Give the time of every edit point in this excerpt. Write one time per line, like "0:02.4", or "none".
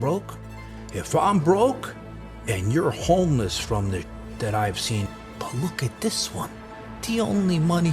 0:05.2